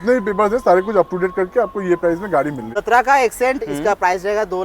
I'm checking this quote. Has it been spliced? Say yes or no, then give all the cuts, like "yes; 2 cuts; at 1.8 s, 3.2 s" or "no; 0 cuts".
yes; 1 cut; at 2.7 s